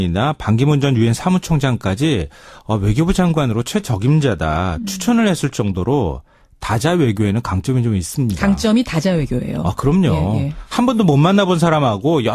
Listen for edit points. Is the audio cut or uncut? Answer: cut